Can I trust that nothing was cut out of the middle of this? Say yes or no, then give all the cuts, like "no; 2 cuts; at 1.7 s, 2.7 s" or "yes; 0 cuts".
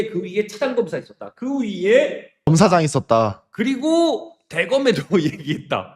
yes; 0 cuts